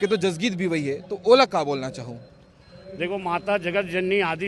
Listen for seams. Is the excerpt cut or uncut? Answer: uncut